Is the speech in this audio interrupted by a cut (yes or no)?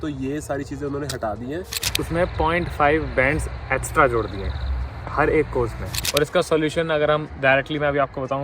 yes